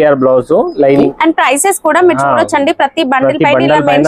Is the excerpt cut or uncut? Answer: cut